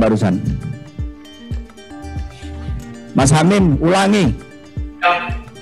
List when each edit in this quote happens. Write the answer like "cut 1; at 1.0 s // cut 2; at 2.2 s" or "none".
cut 1; at 2.0 s